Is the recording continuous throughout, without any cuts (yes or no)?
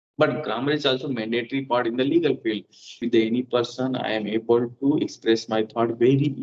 no